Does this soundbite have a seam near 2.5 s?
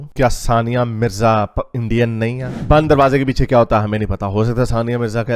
yes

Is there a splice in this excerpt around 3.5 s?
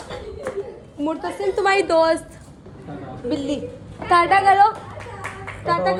no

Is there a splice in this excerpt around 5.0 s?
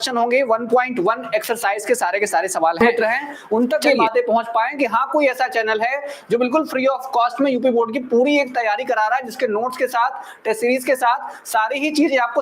no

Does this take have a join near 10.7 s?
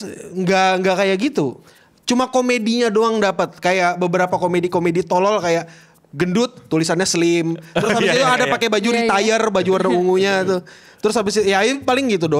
no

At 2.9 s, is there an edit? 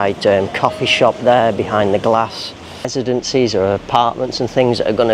yes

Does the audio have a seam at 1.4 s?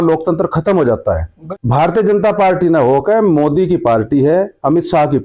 yes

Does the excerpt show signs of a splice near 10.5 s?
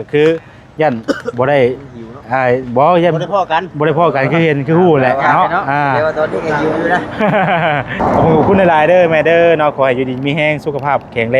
no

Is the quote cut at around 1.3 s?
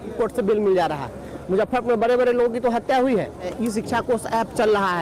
no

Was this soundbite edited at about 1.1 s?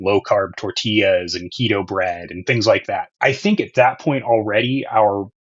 no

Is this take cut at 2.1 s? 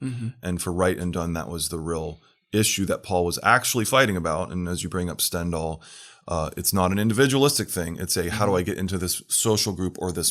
no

